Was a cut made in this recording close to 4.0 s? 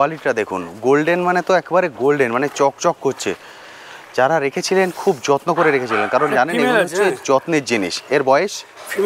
no; 0 cuts

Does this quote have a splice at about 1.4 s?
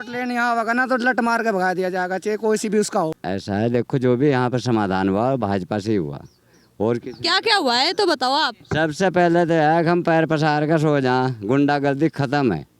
no; 1 cut; at 3.3 s

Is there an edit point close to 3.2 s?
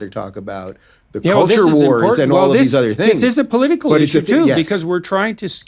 yes; 1 cut; at 3.2 s

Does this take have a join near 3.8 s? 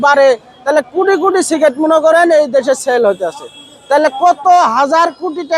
no; 0 cuts

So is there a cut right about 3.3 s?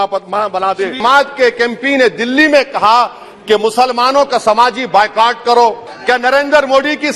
no; 2 cuts; at 1.0 s, 5.9 s

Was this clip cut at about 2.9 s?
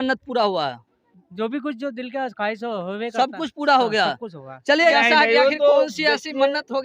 no; 1 cut; at 4.9 s

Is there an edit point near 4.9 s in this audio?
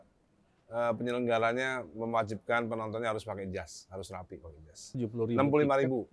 yes; 1 cut; at 4.9 s

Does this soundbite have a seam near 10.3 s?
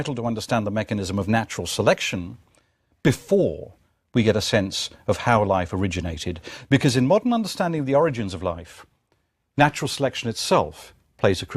yes; 1 cut; at 10.3 s

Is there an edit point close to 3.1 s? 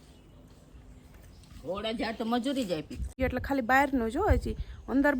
yes; 1 cut; at 3.1 s

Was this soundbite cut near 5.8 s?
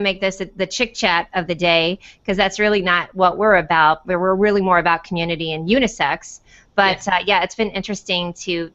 no; 1 cut; at 1.1 s

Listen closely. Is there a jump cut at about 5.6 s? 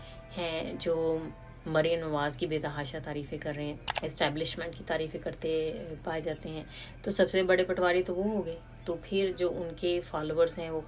no; 1 cut; at 3.9 s

